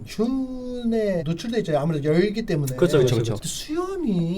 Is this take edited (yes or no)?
yes